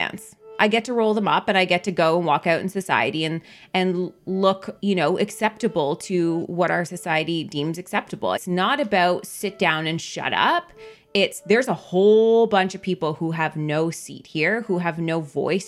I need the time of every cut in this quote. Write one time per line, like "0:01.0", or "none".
0:04.7
0:08.4